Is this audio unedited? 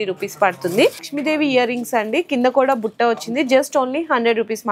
no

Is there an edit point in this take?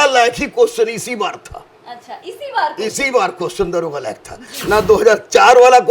no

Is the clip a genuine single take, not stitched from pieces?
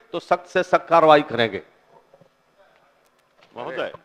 yes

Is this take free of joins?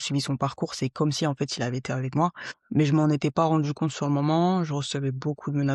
no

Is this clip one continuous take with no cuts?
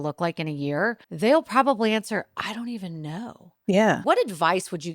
no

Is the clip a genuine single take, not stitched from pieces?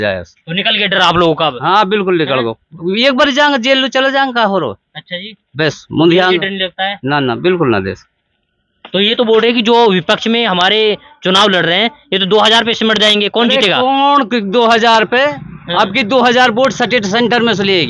yes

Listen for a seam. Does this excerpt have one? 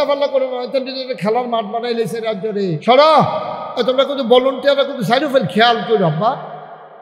yes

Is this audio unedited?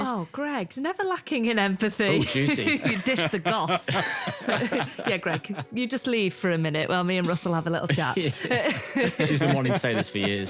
yes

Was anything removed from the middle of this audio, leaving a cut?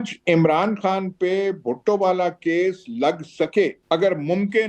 yes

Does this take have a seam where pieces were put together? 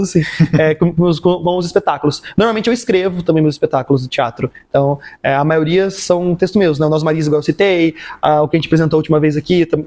no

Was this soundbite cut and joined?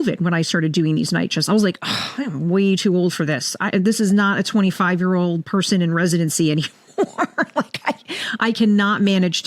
no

